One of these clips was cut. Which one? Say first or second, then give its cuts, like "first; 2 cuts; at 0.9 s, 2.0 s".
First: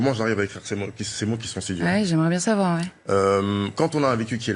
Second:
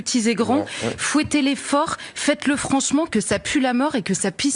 first; 1 cut; at 2.9 s